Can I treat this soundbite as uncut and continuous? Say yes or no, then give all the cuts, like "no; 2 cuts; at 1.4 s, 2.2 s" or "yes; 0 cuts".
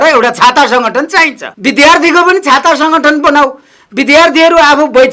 no; 1 cut; at 1.4 s